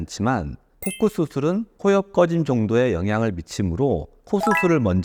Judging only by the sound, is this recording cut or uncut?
uncut